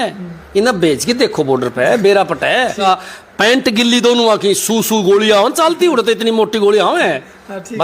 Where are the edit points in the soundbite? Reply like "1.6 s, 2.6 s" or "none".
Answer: 2.8 s